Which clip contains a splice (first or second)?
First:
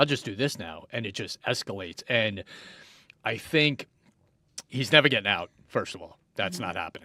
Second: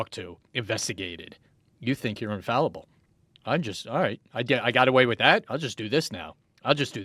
first